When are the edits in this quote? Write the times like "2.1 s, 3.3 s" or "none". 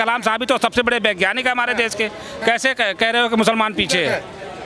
none